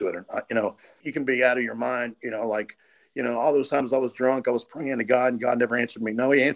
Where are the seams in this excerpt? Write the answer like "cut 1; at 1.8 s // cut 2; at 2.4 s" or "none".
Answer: cut 1; at 1.1 s